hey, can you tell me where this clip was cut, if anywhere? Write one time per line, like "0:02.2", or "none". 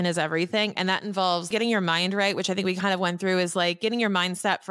0:01.5